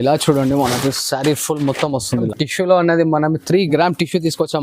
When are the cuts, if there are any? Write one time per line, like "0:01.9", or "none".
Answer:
0:02.2